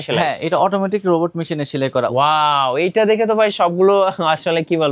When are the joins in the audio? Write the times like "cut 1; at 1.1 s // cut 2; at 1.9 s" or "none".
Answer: cut 1; at 2.1 s